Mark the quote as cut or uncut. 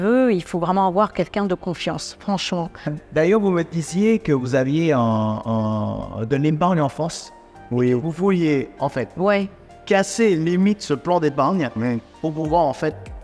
cut